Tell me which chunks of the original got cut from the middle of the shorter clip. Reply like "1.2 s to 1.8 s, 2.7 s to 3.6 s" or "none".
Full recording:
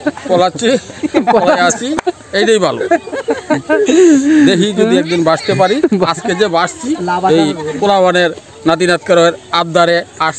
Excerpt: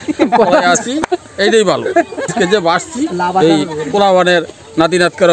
3.2 s to 6.1 s